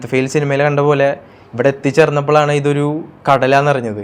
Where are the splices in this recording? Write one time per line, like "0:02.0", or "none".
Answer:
none